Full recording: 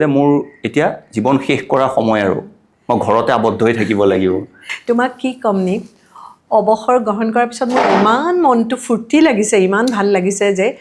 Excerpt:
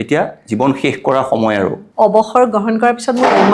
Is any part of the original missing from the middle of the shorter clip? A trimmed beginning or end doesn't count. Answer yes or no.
yes